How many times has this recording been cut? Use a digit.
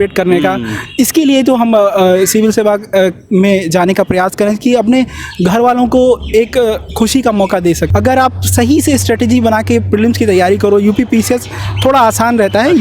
1